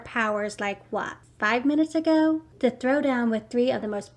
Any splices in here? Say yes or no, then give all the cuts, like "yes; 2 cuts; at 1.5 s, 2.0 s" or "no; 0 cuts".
yes; 2 cuts; at 1.2 s, 2.5 s